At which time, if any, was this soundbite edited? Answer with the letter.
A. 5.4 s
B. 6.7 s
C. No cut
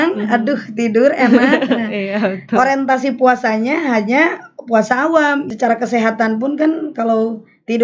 A